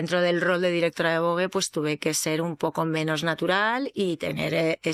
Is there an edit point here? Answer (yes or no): no